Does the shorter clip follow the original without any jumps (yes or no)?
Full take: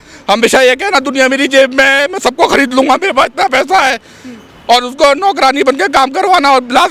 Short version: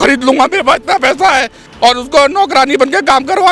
no